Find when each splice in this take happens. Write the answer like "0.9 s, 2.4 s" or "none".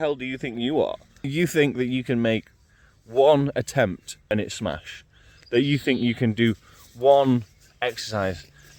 1.3 s, 4.3 s